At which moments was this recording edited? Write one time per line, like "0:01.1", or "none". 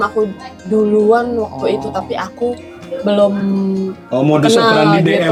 none